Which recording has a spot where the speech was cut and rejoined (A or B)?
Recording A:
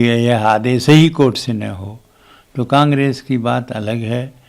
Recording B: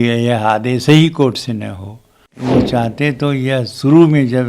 B